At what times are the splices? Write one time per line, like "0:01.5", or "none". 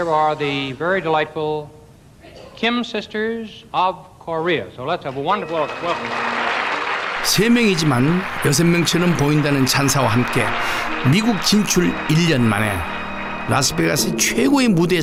none